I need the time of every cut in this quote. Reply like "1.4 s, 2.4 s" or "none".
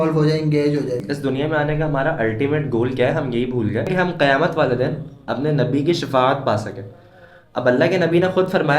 1.0 s, 3.9 s